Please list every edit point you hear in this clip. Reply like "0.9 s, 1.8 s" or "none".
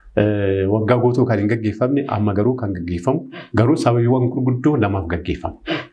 3.4 s